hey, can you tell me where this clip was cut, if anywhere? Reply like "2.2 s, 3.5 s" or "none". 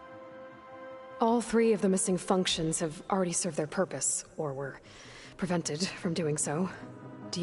1.2 s